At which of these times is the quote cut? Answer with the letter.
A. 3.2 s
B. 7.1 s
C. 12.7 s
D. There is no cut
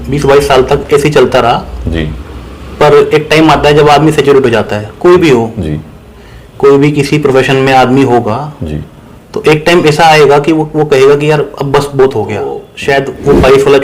C